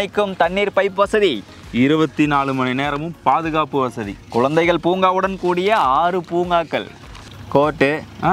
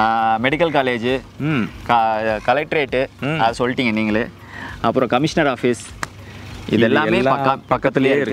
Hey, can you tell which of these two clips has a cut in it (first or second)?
first